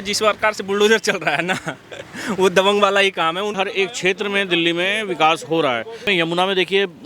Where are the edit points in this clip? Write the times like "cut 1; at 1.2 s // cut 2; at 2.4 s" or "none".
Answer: cut 1; at 3.5 s // cut 2; at 6.0 s

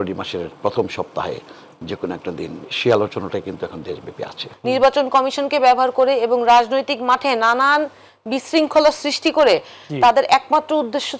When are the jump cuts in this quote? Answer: cut 1; at 4.5 s

